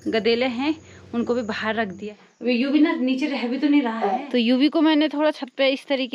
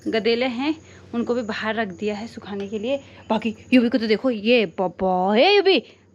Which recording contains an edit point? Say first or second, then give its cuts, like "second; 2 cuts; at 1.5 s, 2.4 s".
first; 2 cuts; at 2.0 s, 4.3 s